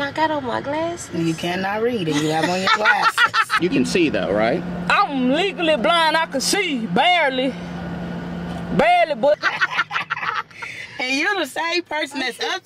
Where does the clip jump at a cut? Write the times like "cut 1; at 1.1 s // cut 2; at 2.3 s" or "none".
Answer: cut 1; at 3.5 s // cut 2; at 9.3 s